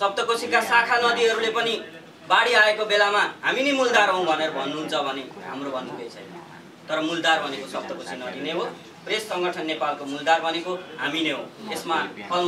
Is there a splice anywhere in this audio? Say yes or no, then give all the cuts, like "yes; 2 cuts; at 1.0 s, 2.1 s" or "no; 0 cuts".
no; 0 cuts